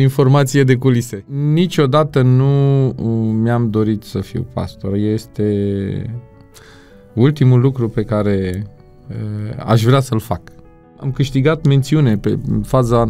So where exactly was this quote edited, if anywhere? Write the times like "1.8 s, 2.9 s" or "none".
1.3 s, 11.1 s